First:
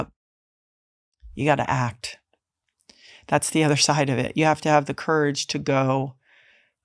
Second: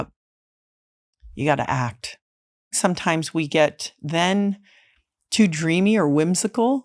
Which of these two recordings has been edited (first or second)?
second